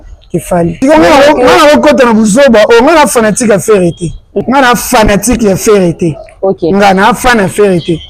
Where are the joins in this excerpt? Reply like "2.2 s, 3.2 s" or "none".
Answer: 0.8 s, 4.4 s

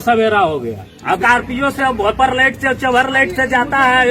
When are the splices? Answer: 1.2 s

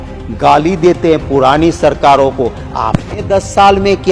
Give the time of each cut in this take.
none

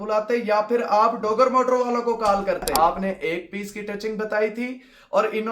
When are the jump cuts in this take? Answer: 2.7 s

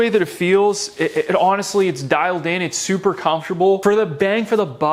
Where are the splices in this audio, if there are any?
none

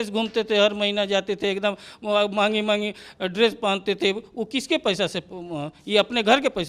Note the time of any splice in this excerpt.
none

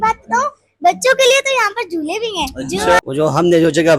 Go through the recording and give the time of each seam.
3.0 s

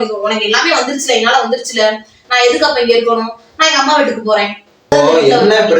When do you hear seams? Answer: 4.9 s

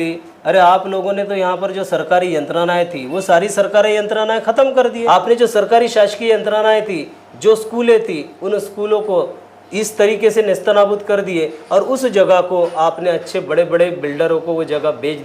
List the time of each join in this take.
5.0 s

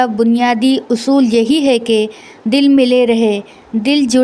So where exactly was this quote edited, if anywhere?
none

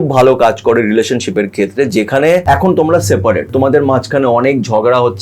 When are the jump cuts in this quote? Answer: 2.4 s, 3.5 s

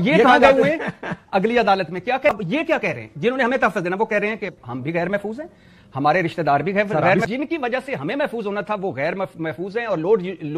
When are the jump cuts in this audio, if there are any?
2.3 s, 7.2 s

